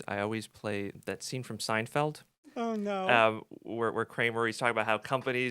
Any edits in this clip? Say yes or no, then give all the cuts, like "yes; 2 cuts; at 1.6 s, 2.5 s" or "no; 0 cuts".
yes; 1 cut; at 1.0 s